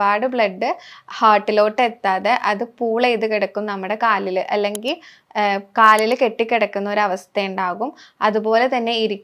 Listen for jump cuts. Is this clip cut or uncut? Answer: uncut